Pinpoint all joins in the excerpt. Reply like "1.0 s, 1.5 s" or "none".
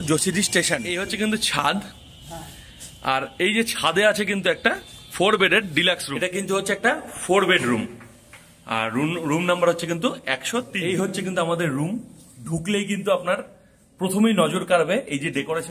1.1 s, 6.2 s, 10.4 s